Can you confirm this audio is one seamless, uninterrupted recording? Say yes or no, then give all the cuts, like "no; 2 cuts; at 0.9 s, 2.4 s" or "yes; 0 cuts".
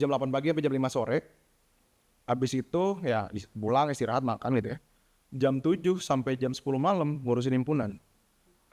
yes; 0 cuts